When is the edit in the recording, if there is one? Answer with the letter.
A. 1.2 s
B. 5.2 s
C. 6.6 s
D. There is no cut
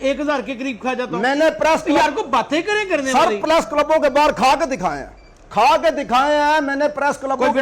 D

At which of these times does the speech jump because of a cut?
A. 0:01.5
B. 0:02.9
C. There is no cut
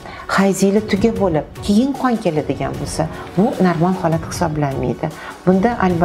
C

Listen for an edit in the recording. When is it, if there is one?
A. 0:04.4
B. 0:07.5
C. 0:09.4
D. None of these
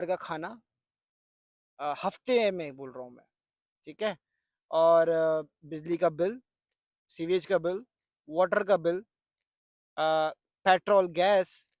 D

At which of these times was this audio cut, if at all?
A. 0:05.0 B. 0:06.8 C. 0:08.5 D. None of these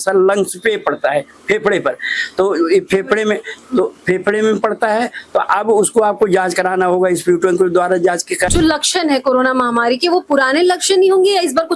C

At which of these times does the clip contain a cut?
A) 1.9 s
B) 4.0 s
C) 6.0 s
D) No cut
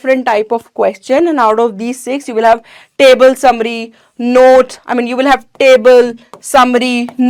D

